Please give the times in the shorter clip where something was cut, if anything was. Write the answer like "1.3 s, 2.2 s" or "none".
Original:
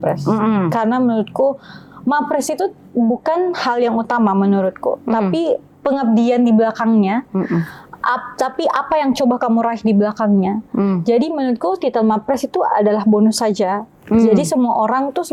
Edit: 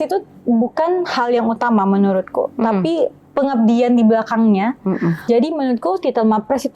5.2 s